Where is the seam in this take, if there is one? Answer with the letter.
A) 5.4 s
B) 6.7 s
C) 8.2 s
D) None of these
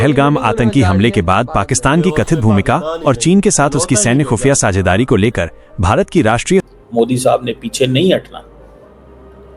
B